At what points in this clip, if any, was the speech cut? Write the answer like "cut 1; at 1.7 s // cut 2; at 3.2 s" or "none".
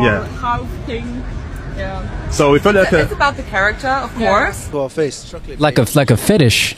cut 1; at 4.6 s